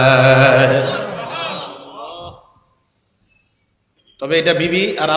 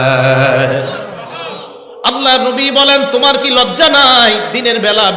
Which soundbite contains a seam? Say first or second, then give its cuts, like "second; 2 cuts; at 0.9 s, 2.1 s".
second; 1 cut; at 1.9 s